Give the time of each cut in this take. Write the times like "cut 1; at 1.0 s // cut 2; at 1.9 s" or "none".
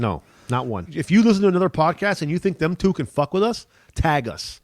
cut 1; at 0.9 s